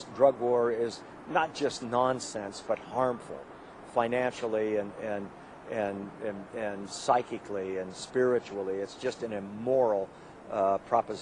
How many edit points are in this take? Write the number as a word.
one